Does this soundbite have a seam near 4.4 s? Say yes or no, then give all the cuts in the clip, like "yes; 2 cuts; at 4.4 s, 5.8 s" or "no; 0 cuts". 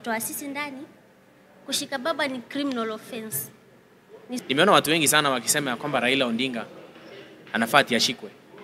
yes; 1 cut; at 4.4 s